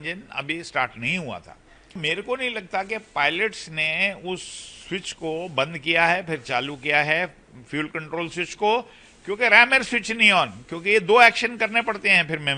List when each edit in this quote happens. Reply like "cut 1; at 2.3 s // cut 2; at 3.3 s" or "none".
cut 1; at 2.0 s

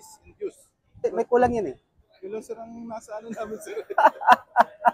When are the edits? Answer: cut 1; at 1.0 s // cut 2; at 2.1 s

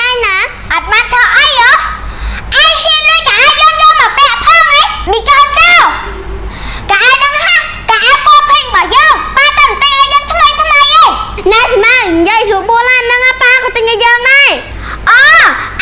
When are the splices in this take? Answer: cut 1; at 14.7 s

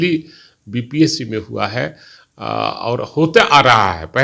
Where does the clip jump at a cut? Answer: none

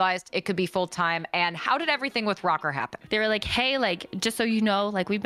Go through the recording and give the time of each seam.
cut 1; at 3.0 s // cut 2; at 4.1 s

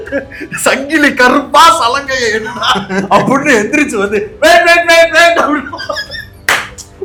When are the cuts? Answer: none

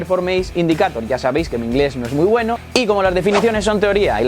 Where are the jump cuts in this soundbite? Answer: cut 1; at 2.6 s

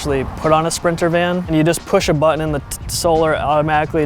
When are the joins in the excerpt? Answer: cut 1; at 1.5 s

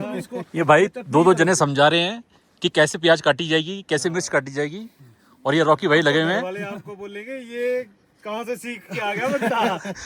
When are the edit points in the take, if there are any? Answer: none

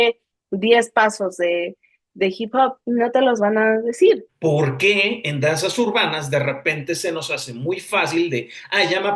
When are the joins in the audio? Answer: cut 1; at 4.2 s

